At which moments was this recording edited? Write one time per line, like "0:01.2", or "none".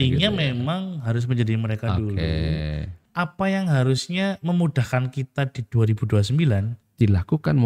0:03.0